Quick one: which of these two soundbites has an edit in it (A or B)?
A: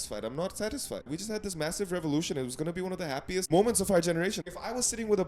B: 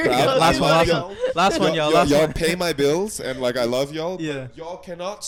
A